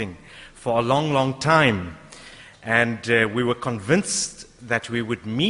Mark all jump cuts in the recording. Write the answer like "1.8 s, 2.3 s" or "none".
none